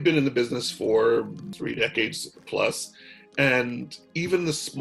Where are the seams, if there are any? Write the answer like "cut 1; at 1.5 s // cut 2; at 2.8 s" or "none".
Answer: cut 1; at 1.5 s